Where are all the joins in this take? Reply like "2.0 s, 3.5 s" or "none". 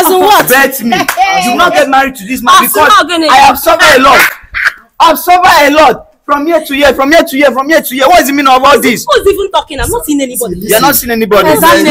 none